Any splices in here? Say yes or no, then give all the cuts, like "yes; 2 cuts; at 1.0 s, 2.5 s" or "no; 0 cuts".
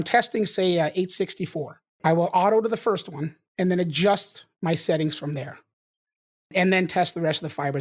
yes; 1 cut; at 1.9 s